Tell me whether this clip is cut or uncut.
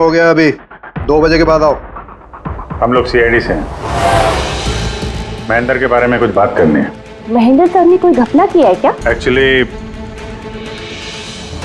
cut